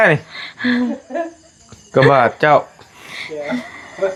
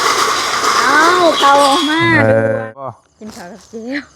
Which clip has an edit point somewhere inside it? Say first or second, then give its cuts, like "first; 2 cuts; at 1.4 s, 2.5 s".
second; 1 cut; at 2.8 s